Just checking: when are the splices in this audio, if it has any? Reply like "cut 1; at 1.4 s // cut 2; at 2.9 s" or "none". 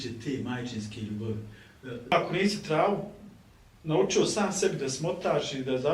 cut 1; at 2.1 s